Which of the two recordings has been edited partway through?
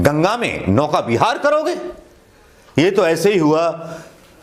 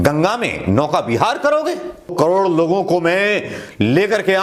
second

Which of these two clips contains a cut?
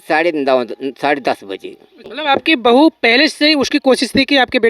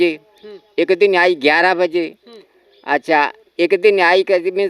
first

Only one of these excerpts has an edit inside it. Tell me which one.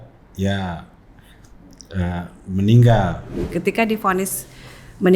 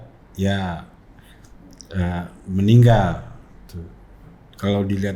first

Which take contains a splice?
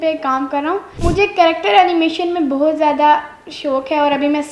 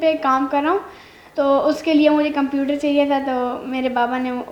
first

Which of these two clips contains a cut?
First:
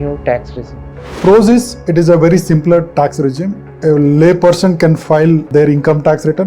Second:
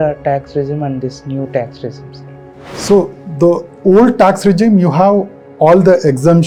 first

